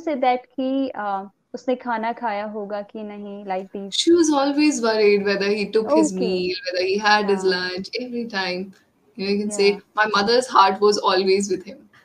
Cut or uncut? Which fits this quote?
uncut